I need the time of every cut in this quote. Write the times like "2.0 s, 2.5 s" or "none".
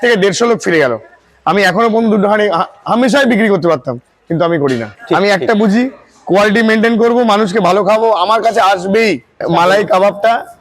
4.9 s, 9.4 s